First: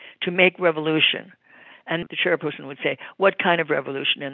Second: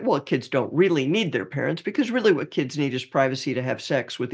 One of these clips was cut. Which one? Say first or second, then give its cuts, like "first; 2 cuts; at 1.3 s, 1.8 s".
first; 1 cut; at 2.0 s